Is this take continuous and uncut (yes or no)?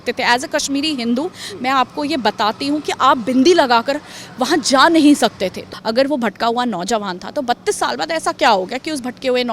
no